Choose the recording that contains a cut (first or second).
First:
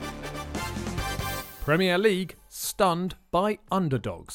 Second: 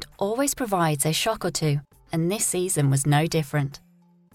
first